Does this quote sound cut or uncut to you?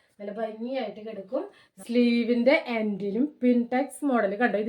cut